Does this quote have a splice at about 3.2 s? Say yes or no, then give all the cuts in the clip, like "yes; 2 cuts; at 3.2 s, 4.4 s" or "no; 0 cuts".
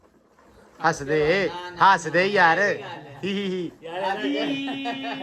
no; 0 cuts